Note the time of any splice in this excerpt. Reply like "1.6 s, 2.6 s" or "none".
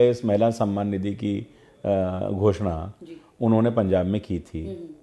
none